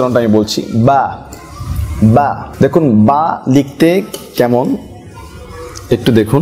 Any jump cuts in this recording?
no; 0 cuts

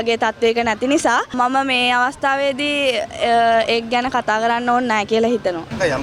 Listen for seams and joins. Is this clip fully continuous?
yes; 0 cuts

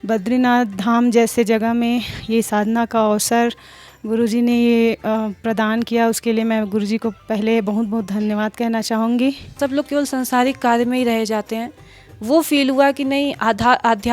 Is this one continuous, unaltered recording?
no; 1 cut; at 9.5 s

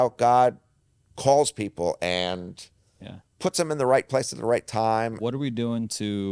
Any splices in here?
yes; 1 cut; at 5.2 s

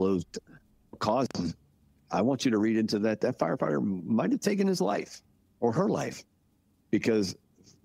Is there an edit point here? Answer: yes; 2 cuts; at 1.0 s, 3.2 s

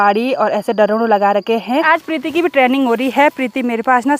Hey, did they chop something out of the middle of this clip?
yes; 1 cut; at 1.9 s

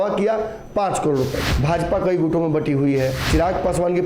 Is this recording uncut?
no; 2 cuts; at 1.5 s, 3.2 s

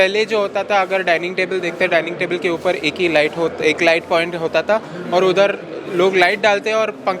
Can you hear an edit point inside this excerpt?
no; 0 cuts

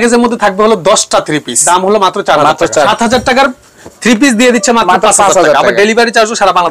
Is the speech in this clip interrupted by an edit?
yes; 2 cuts; at 1.6 s, 2.9 s

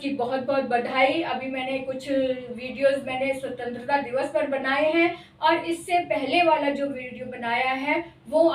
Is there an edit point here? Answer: no; 0 cuts

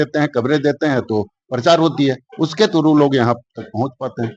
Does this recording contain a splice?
no; 0 cuts

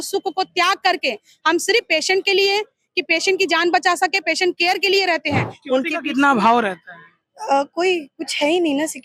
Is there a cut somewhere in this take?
yes; 1 cut; at 5.5 s

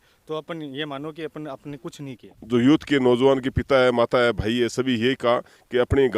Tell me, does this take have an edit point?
yes; 1 cut; at 2.3 s

